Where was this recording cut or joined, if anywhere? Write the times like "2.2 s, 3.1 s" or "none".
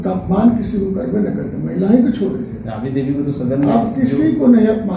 none